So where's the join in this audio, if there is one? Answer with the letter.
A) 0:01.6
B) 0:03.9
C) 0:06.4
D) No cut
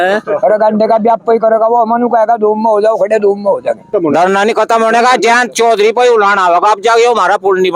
B